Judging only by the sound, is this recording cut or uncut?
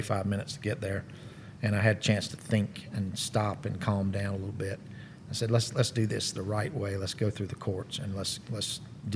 uncut